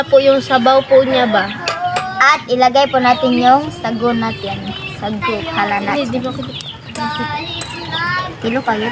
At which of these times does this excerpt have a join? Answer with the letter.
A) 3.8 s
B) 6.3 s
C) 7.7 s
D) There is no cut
D